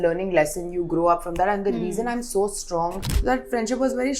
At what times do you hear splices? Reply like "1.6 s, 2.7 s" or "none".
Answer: 3.1 s